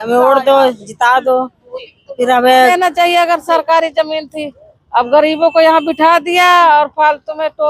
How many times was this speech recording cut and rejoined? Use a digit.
1